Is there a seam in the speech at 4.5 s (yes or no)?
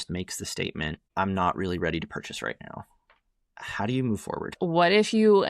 yes